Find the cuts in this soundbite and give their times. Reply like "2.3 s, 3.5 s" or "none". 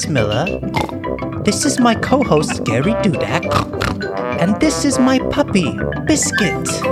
none